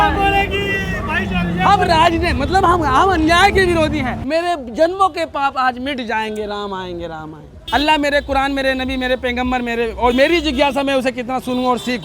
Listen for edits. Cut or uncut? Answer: cut